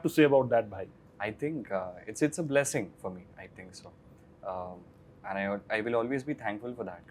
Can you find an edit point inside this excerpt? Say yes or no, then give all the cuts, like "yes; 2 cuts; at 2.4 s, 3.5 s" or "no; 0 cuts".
no; 0 cuts